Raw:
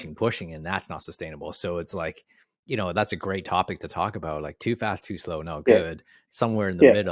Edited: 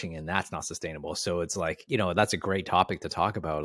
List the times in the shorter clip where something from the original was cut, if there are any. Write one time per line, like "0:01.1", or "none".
0:01.8